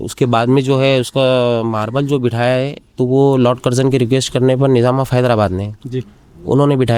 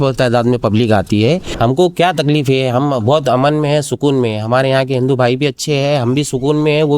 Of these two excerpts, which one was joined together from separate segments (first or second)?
second